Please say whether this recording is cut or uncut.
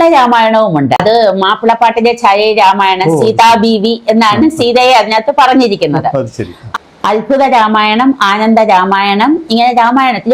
uncut